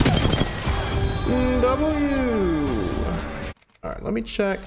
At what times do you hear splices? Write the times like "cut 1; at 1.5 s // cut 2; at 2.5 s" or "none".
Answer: cut 1; at 3.6 s